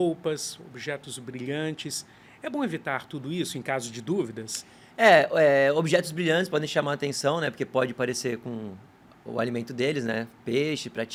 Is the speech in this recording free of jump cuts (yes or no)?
yes